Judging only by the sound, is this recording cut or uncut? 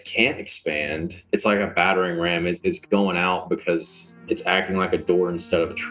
cut